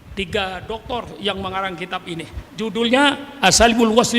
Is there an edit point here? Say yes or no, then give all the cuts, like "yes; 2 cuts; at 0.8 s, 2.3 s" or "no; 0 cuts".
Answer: yes; 1 cut; at 2.4 s